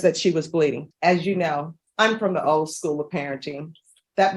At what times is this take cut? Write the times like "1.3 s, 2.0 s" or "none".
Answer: 0.8 s, 1.8 s